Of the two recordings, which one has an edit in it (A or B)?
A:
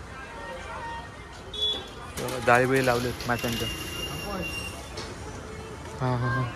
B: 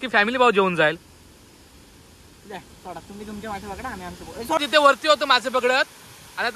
B